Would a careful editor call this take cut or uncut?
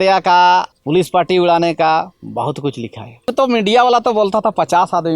cut